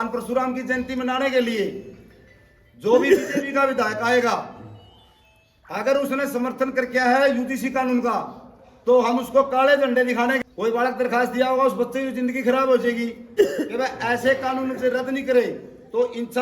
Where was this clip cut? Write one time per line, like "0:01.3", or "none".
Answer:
0:10.4
0:13.2